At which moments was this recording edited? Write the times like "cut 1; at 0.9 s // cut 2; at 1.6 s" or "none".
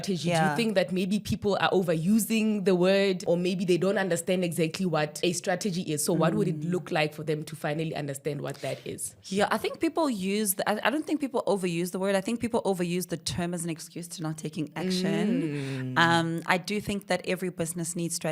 cut 1; at 3.2 s // cut 2; at 5.1 s